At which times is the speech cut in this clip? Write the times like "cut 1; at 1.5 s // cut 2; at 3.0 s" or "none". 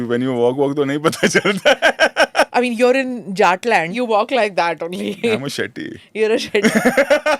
cut 1; at 2.5 s // cut 2; at 3.9 s